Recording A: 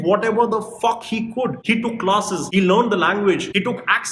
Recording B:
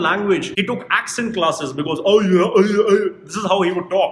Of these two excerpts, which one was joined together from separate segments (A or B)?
A